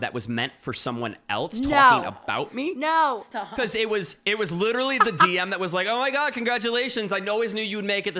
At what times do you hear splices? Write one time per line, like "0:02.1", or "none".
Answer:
none